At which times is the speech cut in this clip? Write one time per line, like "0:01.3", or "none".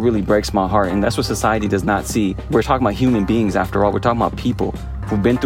0:01.0
0:02.4